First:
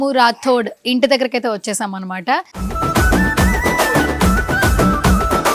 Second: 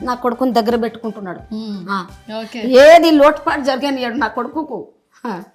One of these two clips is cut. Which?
first; 1 cut; at 2.6 s

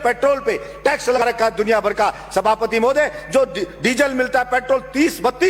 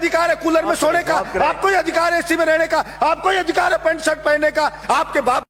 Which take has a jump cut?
first; 1 cut; at 1.2 s

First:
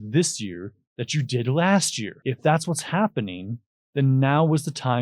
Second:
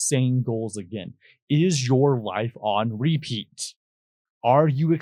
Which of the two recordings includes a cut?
first; 1 cut; at 2.0 s

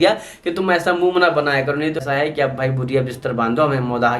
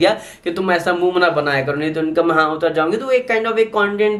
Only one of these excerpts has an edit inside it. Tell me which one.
first; 1 cut; at 2.0 s

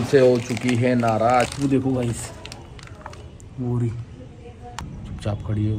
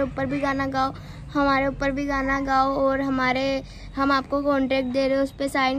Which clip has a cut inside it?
first; 2 cuts; at 1.5 s, 4.8 s

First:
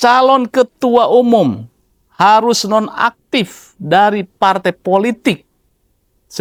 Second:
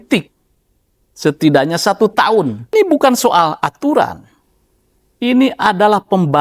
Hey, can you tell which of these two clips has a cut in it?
second; 1 cut; at 2.7 s

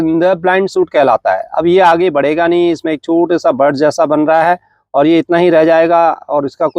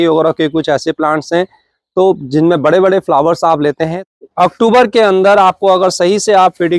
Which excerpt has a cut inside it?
second; 1 cut; at 3.9 s

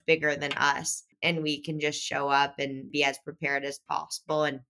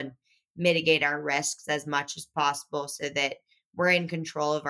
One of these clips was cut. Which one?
first; 1 cut; at 2.9 s

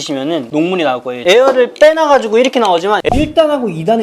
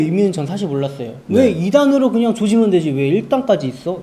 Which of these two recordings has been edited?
first; 2 cuts; at 1.1 s, 3.0 s

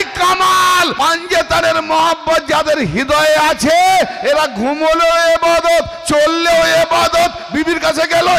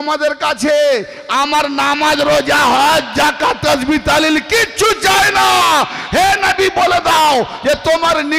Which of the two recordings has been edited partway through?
first; 1 cut; at 0.9 s

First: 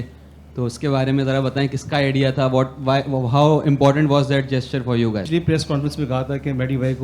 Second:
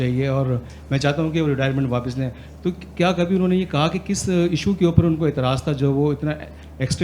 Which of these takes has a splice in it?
first; 1 cut; at 5.2 s

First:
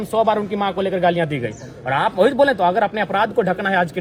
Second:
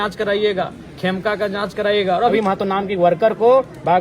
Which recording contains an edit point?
second; 1 cut; at 2.3 s

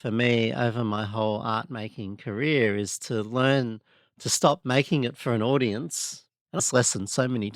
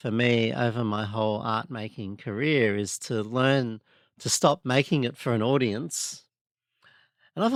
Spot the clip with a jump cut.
first; 1 cut; at 6.7 s

